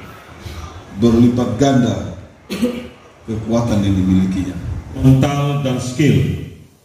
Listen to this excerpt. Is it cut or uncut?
cut